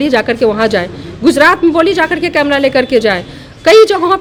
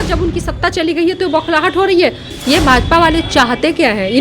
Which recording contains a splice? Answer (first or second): second